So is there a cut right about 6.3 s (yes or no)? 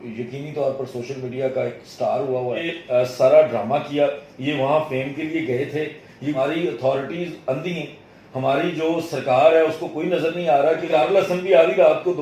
yes